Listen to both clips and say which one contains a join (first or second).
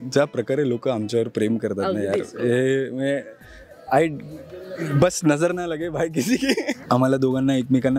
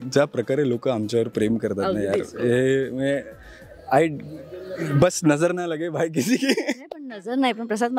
first